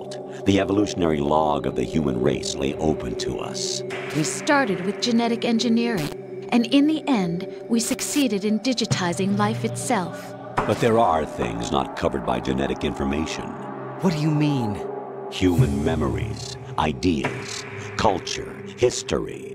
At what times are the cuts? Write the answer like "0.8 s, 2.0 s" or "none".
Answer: none